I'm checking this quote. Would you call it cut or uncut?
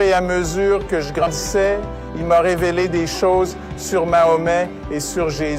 cut